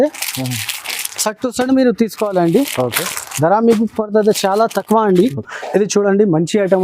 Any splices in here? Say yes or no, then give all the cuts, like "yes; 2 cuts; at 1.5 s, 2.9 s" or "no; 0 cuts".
yes; 1 cut; at 5.6 s